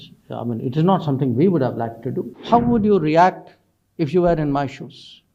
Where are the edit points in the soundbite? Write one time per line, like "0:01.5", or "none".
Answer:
0:02.3